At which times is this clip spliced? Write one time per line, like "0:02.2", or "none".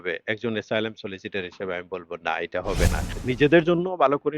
0:03.0

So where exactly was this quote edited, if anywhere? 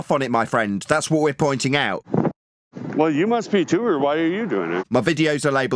0:02.0
0:04.8

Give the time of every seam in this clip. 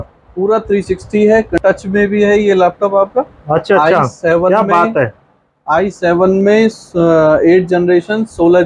0:01.5

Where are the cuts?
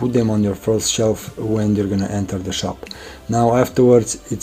none

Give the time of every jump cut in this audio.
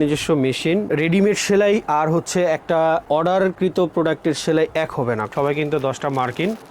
0:00.9
0:03.3
0:05.3

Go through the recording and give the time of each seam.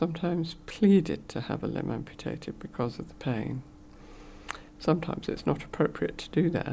none

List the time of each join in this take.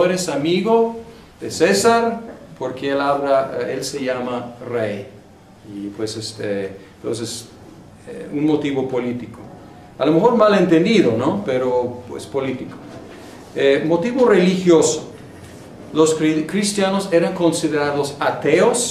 0:06.9

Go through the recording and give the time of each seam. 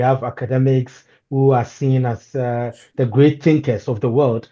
none

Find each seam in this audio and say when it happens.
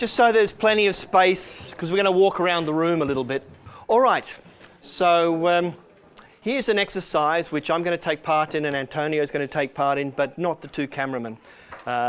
0:08.2

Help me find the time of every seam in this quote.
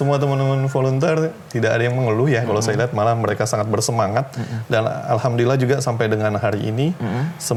none

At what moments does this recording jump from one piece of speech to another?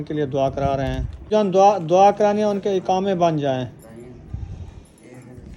0:01.3

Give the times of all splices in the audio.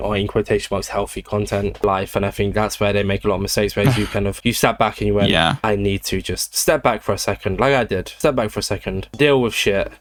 none

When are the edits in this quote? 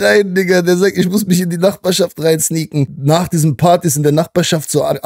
0:02.9

